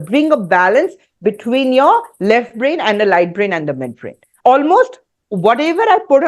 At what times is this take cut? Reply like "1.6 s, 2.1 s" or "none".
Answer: 4.3 s